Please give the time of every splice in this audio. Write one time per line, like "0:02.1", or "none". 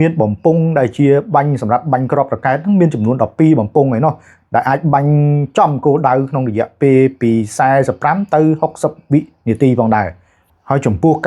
none